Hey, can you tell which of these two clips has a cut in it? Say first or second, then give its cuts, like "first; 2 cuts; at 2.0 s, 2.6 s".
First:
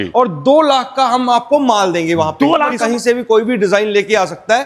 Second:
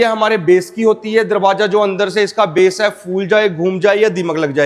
first; 1 cut; at 2.8 s